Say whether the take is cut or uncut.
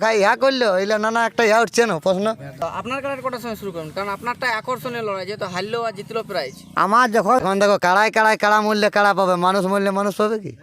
cut